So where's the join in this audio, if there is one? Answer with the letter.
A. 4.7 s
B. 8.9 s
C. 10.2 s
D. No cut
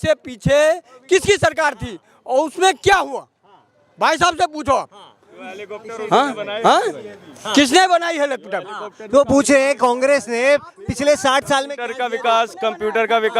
D